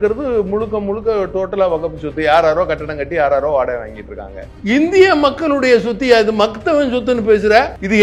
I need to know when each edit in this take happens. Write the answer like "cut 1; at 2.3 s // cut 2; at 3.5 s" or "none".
cut 1; at 4.5 s